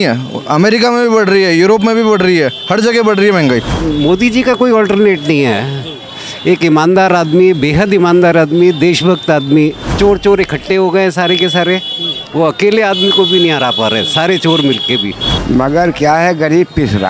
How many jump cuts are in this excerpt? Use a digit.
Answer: 3